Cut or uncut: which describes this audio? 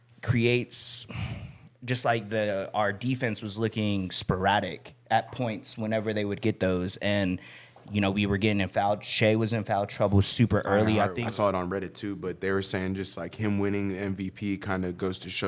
cut